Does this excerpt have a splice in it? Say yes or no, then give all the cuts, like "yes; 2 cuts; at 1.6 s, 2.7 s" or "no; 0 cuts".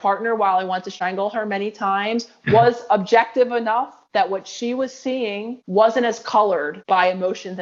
yes; 1 cut; at 0.9 s